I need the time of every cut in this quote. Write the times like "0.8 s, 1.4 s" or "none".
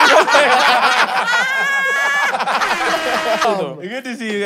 3.4 s